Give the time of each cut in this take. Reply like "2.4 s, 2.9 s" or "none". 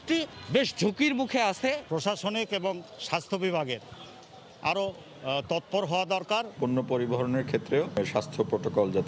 1.8 s, 6.5 s, 8.0 s